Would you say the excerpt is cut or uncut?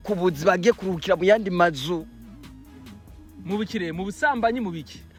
uncut